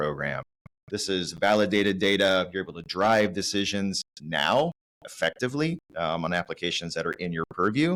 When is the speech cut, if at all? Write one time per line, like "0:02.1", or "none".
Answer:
none